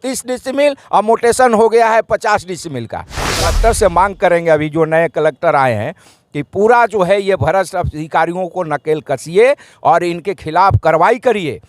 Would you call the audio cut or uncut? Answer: cut